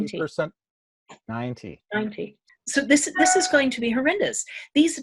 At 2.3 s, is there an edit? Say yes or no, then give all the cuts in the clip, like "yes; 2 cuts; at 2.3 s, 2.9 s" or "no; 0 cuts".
yes; 1 cut; at 2.3 s